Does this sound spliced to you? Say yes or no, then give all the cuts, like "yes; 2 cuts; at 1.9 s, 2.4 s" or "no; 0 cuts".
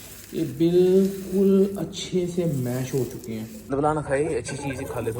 yes; 1 cut; at 3.7 s